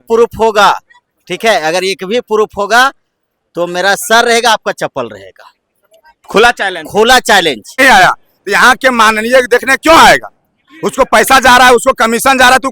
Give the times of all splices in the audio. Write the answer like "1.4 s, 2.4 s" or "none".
7.8 s